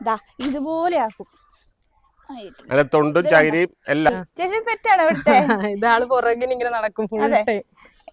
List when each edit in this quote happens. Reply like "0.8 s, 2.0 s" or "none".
4.1 s